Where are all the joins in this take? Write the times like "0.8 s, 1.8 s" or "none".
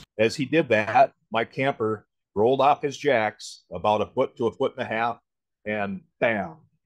1.2 s, 2.2 s